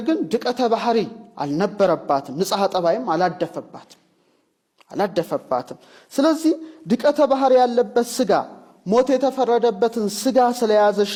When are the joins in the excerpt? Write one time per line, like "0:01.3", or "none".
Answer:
none

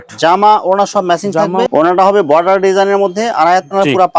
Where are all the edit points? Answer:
0:01.7

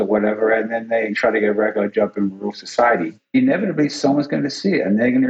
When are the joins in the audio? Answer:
0:01.1
0:03.3

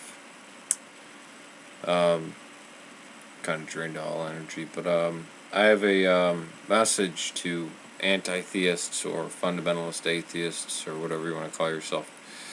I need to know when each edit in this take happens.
none

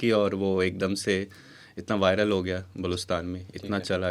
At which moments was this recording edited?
none

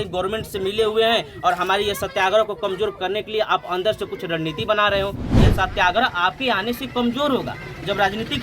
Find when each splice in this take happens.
0:05.3

